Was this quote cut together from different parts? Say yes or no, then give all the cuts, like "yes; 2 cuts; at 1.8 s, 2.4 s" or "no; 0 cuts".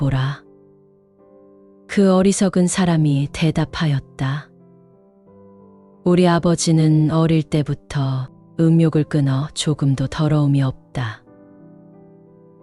yes; 2 cuts; at 4.5 s, 6.0 s